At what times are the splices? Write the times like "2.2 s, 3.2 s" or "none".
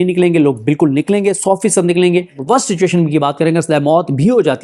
2.3 s